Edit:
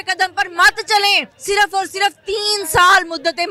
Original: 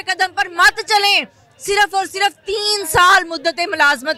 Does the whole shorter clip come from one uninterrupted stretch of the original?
no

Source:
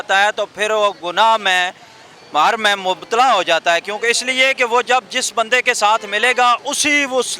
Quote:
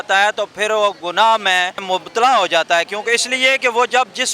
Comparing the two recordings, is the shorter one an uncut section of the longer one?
no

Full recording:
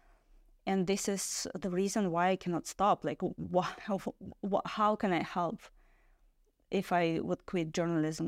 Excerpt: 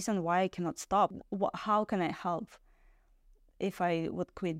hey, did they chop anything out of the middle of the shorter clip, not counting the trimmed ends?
yes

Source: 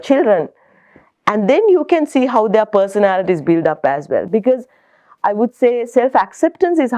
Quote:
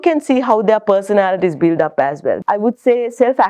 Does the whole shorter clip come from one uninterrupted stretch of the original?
no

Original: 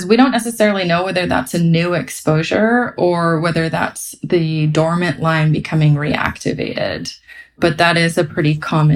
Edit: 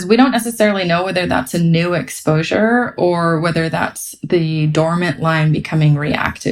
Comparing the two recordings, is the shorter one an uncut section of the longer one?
yes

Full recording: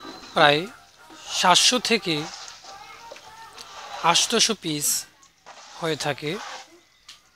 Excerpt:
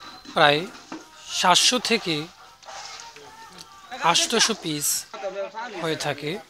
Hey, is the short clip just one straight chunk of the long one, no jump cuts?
yes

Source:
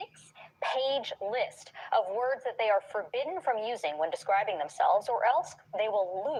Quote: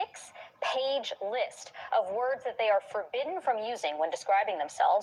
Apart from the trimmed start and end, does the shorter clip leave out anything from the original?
no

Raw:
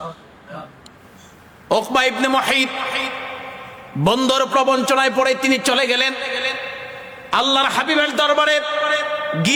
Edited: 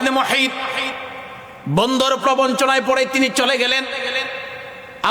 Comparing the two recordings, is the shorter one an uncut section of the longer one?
no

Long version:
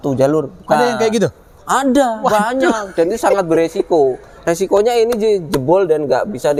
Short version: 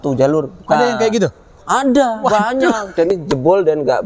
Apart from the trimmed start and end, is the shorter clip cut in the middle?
yes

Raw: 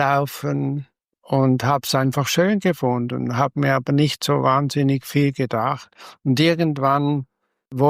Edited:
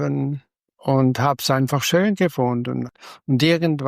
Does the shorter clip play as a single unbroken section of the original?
no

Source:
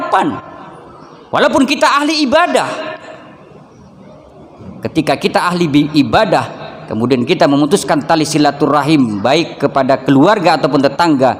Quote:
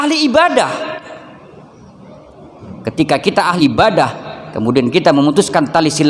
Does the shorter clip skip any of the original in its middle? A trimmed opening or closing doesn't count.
yes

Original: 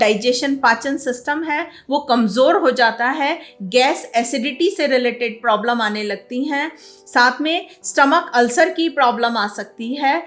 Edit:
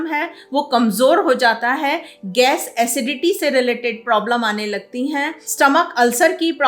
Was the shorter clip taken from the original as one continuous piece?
no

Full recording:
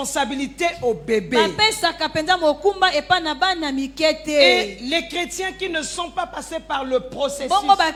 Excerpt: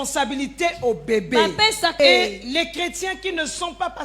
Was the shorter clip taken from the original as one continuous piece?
no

